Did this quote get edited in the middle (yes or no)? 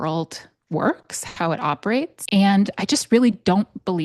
yes